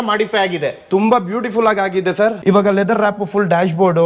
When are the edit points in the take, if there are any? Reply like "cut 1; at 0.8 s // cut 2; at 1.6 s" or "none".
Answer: cut 1; at 2.4 s